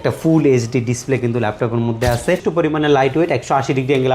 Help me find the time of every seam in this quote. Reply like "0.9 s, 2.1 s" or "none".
2.4 s